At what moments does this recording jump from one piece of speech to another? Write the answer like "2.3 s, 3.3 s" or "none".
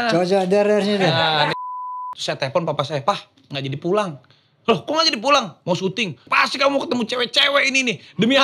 1.5 s, 6.2 s